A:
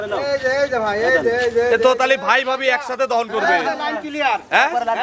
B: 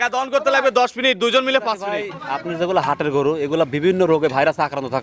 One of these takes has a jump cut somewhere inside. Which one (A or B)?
B